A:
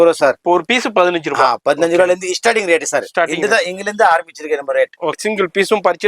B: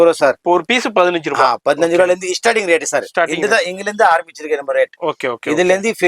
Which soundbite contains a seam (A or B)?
A